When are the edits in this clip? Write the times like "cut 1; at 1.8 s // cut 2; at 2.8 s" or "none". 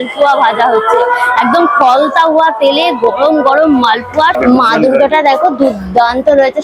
cut 1; at 4.5 s